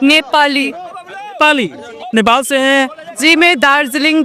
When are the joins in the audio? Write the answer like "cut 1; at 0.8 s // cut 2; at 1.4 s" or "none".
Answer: none

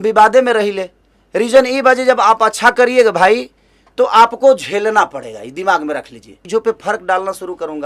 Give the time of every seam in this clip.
cut 1; at 6.3 s

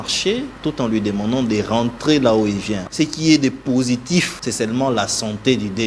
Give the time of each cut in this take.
cut 1; at 2.8 s // cut 2; at 4.4 s

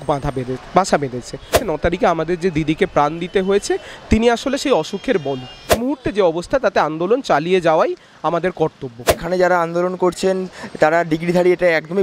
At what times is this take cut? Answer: cut 1; at 1.6 s // cut 2; at 5.8 s // cut 3; at 9.1 s

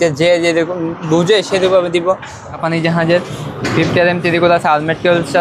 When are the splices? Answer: cut 1; at 2.6 s

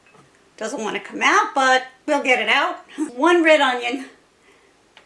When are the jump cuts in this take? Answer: cut 1; at 3.1 s

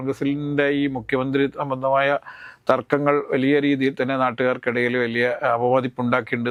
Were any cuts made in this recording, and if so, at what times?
none

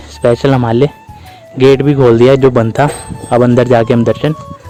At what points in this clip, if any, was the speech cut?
none

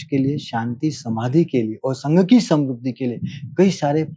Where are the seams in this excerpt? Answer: none

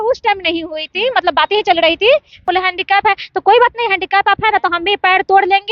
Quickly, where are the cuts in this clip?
cut 1; at 2.4 s

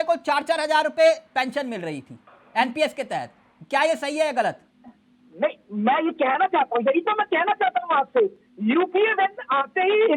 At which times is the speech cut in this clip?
none

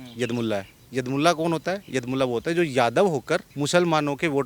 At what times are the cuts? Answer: cut 1; at 3.5 s

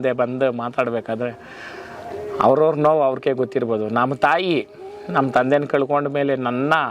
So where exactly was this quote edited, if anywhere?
none

